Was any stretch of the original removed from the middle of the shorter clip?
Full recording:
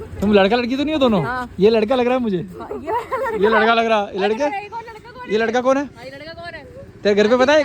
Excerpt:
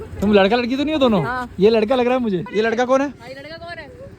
yes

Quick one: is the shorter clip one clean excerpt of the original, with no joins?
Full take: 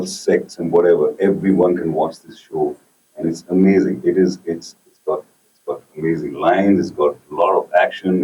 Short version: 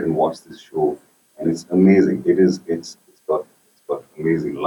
yes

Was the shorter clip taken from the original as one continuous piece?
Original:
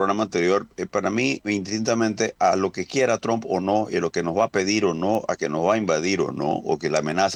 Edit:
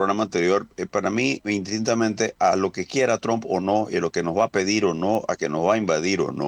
yes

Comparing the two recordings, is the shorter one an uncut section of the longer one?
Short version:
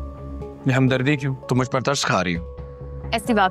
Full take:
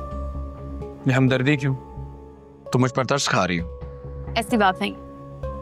no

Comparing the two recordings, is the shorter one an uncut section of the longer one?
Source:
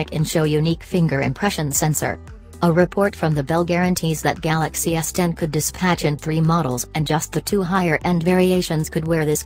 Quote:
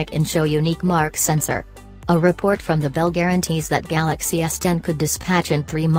no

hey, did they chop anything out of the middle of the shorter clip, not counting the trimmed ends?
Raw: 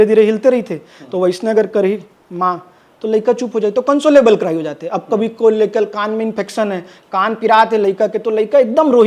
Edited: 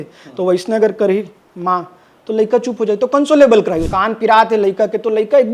yes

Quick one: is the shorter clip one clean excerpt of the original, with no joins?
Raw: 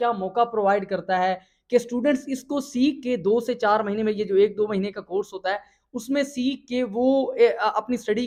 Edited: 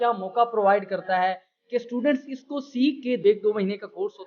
no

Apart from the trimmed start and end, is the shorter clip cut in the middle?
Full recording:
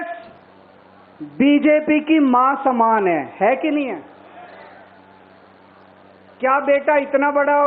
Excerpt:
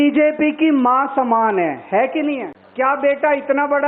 yes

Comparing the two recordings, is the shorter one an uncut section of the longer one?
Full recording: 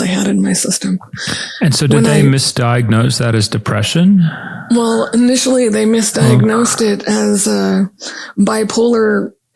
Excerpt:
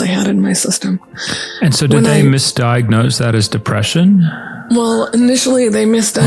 yes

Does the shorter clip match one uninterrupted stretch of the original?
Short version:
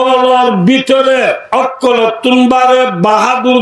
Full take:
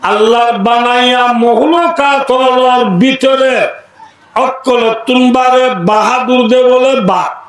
no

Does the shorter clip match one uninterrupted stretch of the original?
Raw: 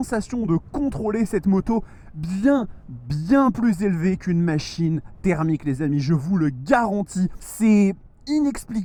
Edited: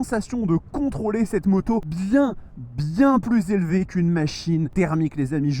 no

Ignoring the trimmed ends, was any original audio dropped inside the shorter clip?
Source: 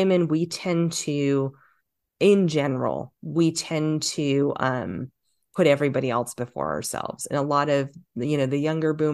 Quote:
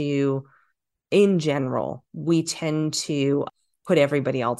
yes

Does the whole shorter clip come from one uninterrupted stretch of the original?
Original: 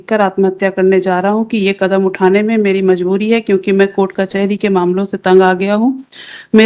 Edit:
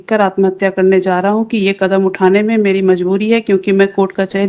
yes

